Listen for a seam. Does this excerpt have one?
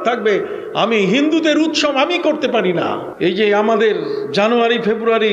yes; 1 cut; at 3.1 s

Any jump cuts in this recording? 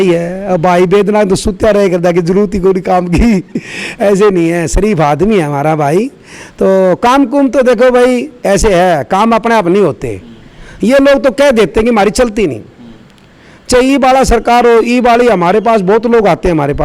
no; 0 cuts

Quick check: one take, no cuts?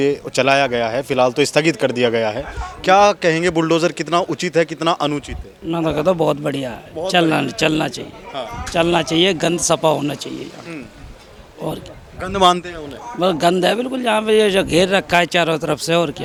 yes; 0 cuts

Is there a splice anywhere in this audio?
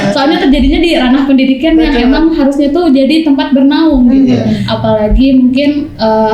yes; 1 cut; at 4.7 s

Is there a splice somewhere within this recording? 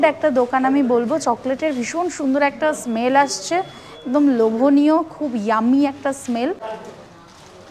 no; 0 cuts

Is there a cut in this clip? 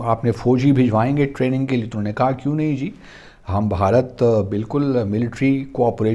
no; 0 cuts

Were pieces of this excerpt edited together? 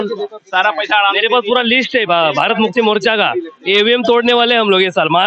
no; 0 cuts

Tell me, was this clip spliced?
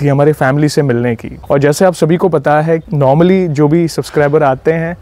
yes; 1 cut; at 1.3 s

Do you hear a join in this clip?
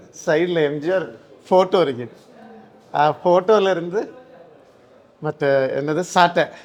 no; 0 cuts

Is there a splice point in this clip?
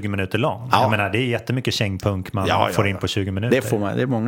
no; 0 cuts

